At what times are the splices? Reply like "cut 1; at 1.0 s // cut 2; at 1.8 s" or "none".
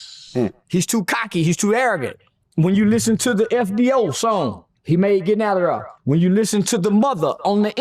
cut 1; at 2.1 s // cut 2; at 5.9 s